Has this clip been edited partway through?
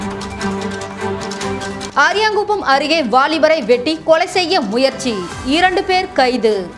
no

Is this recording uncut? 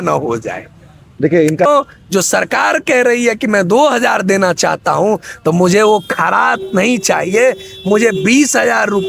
no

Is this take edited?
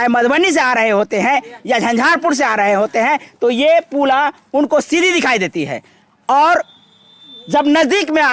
no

